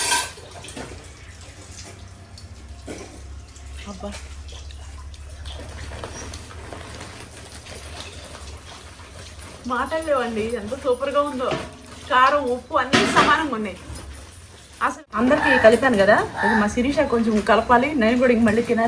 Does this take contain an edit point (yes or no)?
yes